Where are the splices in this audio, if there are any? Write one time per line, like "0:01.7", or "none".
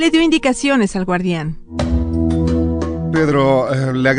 none